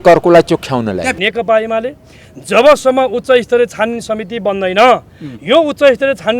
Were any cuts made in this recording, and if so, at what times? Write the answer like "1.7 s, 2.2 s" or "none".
1.2 s